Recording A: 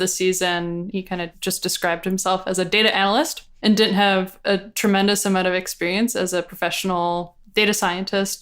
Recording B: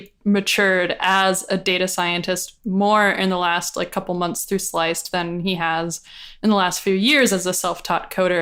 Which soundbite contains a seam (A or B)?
A